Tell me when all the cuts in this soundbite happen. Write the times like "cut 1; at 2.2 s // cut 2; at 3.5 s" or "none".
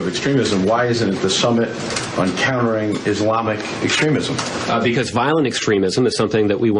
cut 1; at 4.5 s